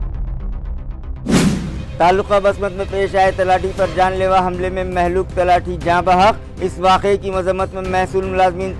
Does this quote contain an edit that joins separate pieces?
no; 0 cuts

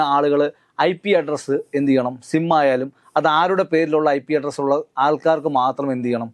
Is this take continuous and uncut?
yes; 0 cuts

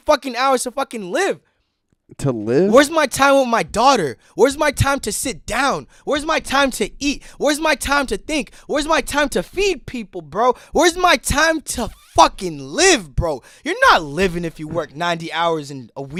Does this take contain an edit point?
no; 0 cuts

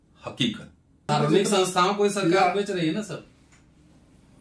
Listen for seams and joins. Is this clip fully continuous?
no; 1 cut; at 1.1 s

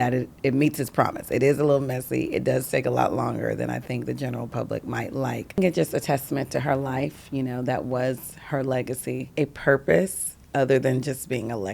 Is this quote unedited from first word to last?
no; 2 cuts; at 5.6 s, 9.2 s

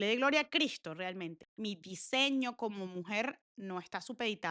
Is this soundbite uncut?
no; 1 cut; at 1.5 s

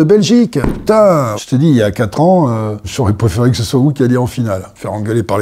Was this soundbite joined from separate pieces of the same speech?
yes; 1 cut; at 1.4 s

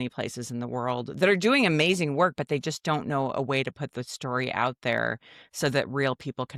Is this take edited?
no; 0 cuts

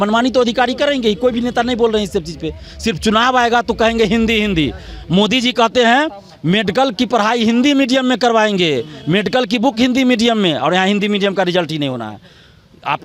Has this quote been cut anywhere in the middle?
no; 0 cuts

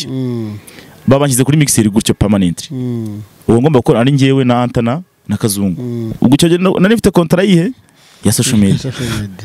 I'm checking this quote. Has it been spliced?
yes; 1 cut; at 6.1 s

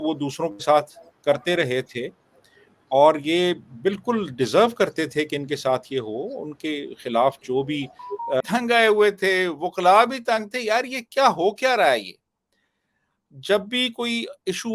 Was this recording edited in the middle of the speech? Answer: yes; 1 cut; at 8.4 s

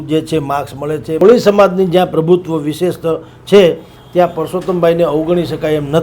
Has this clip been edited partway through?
yes; 1 cut; at 1.2 s

